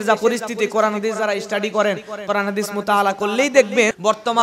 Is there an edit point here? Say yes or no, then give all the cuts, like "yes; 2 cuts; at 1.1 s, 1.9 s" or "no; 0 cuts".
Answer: no; 0 cuts